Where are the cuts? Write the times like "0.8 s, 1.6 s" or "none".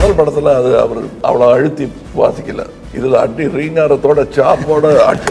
1.1 s, 2.0 s, 2.8 s